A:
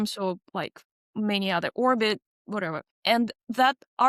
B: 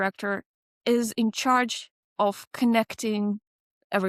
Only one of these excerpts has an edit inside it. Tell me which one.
A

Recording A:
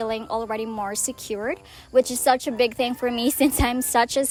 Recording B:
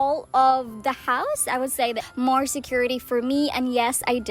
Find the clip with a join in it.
B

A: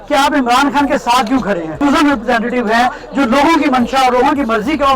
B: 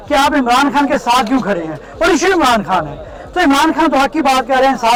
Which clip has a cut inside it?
A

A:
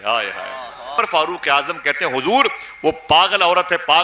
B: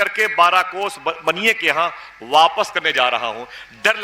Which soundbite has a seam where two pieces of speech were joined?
A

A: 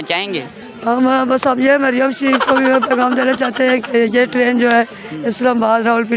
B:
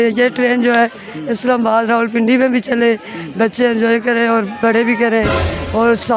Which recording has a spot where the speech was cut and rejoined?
A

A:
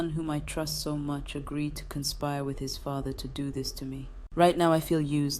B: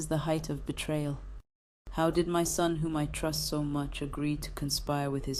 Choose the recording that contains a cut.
A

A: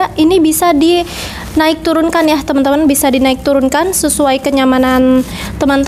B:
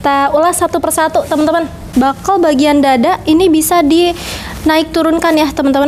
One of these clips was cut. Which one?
B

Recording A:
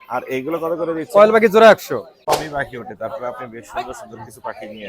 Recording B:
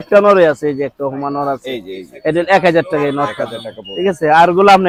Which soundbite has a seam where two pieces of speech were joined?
A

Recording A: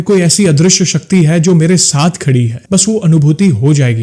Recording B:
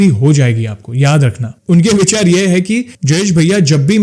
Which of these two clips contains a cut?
B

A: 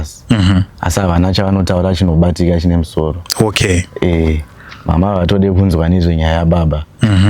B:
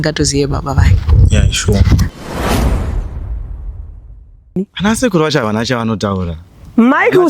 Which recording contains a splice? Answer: B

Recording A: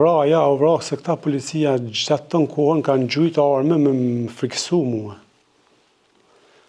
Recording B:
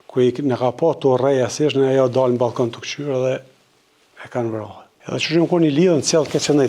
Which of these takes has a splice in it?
B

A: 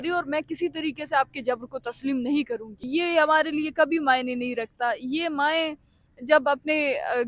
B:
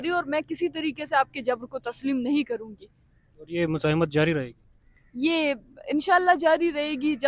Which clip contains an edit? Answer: A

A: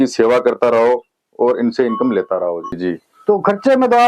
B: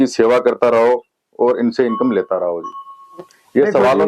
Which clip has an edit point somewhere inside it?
A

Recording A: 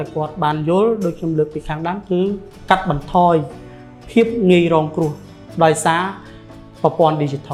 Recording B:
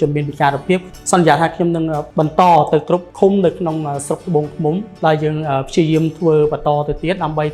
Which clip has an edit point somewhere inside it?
B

